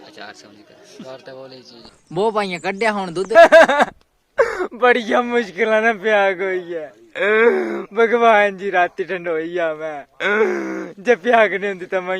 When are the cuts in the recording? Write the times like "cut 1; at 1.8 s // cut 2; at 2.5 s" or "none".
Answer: cut 1; at 1.7 s // cut 2; at 3.3 s